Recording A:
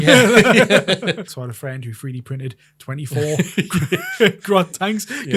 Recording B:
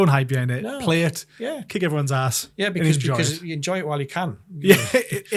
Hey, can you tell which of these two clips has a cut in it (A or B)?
A